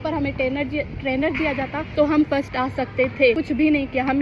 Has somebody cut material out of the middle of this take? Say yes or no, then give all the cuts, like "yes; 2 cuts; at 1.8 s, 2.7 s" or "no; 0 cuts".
yes; 2 cuts; at 1.8 s, 3.4 s